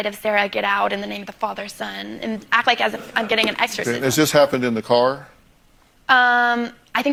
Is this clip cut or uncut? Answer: uncut